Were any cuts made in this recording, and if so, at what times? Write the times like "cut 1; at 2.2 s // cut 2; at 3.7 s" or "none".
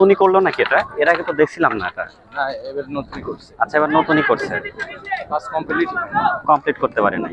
none